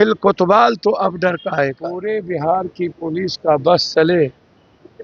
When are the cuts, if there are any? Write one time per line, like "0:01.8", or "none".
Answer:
0:02.0